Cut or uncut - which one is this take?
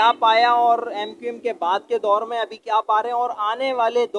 uncut